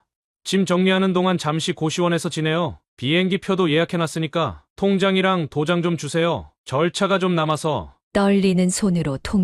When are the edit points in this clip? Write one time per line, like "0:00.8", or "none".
0:04.6